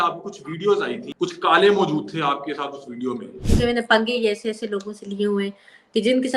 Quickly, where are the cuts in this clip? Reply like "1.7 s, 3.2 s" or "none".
1.1 s, 3.3 s

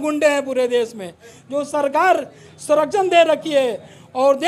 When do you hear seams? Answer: none

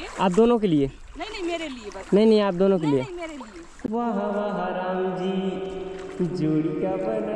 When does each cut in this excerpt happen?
none

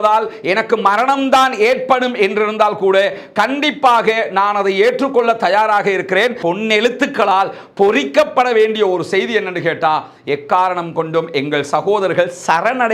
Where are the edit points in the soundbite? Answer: 6.5 s

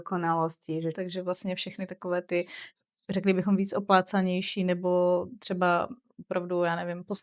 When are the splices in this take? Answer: 1.0 s

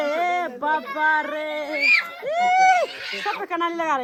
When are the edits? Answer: none

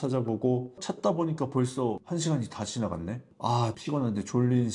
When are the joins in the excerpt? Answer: 2.0 s

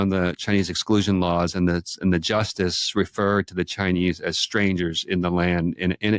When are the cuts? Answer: none

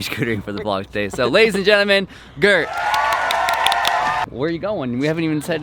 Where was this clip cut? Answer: 4.3 s

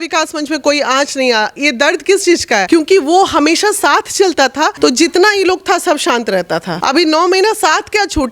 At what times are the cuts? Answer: 2.6 s, 4.7 s, 6.7 s

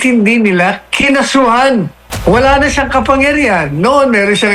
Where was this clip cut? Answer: 2.0 s

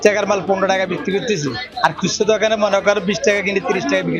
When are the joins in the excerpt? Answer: none

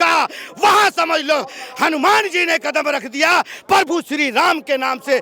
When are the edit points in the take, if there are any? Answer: none

